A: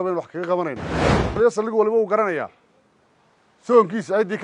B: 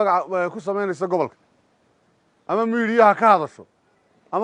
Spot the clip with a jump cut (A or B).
A